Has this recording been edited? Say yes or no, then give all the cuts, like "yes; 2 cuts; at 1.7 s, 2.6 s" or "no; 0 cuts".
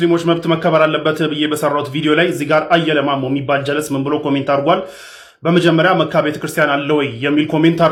no; 0 cuts